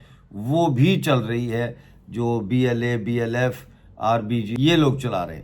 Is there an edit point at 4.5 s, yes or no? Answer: yes